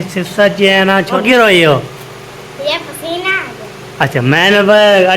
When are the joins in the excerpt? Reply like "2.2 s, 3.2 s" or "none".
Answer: 1.2 s

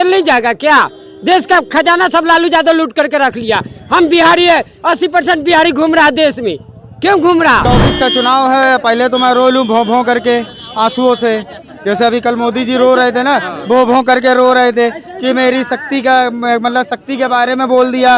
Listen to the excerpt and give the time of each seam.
7.6 s

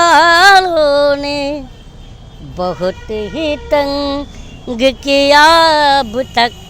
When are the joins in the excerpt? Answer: none

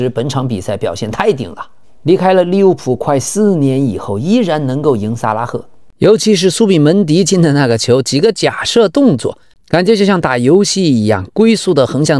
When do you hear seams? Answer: 5.8 s

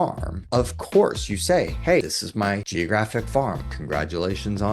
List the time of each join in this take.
3.7 s

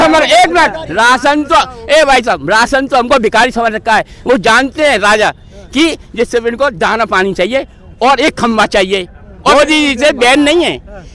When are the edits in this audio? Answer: 9.4 s

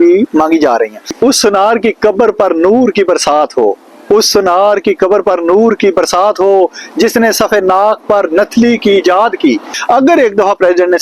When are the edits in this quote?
9.7 s

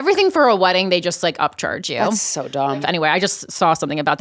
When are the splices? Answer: 2.8 s

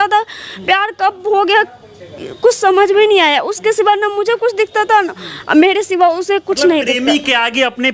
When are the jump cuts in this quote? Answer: none

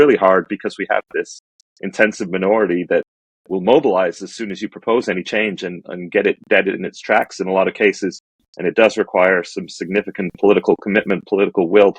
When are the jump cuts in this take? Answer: none

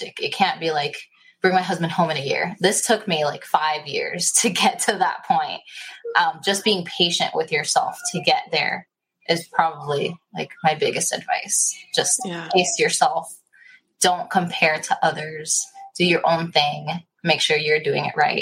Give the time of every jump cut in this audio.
none

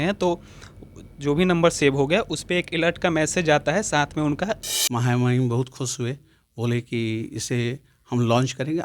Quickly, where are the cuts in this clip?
4.7 s

